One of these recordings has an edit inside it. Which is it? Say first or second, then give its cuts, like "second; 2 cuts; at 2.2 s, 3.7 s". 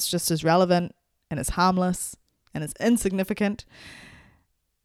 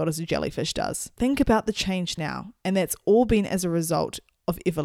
second; 1 cut; at 1.0 s